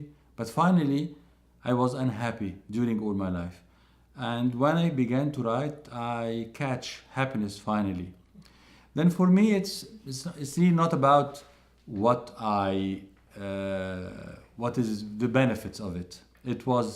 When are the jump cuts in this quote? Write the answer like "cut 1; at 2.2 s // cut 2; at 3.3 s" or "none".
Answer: cut 1; at 15.9 s